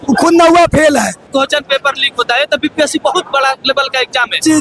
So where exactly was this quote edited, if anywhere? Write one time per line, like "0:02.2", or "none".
0:01.2